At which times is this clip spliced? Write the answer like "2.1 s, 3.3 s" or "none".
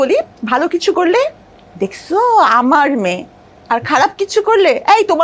none